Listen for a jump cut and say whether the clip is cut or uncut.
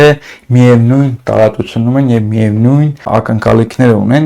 cut